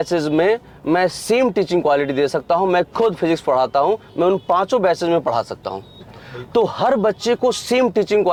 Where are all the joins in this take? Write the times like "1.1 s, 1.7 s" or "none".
none